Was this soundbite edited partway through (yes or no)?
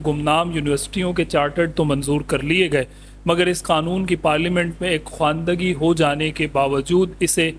no